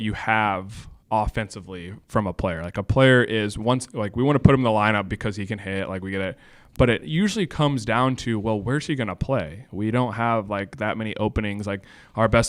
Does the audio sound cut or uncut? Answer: uncut